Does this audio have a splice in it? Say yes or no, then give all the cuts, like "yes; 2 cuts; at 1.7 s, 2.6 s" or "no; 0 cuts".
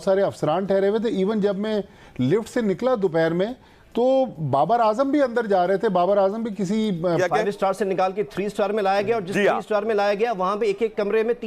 yes; 1 cut; at 7.2 s